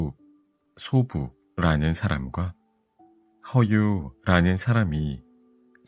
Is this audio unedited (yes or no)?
yes